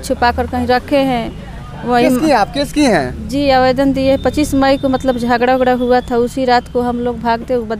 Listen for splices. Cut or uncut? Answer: uncut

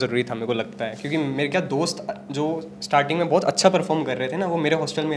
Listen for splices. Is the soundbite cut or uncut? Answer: uncut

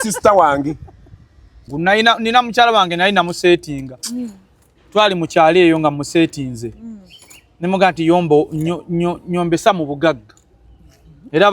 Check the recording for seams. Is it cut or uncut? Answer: cut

